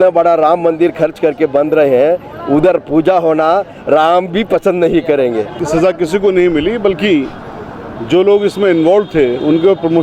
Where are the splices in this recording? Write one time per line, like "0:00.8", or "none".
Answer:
0:05.5